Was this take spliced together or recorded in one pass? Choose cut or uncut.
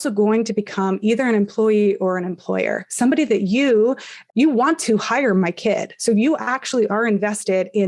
cut